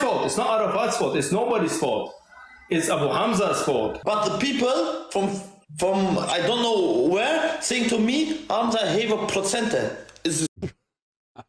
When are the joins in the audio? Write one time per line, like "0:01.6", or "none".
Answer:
0:04.0